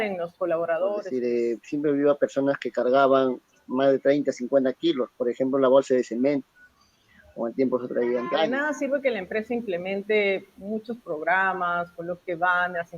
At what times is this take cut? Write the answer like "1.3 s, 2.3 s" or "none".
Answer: 1.0 s, 8.4 s